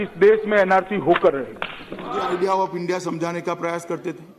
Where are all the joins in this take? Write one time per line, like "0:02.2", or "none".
0:02.2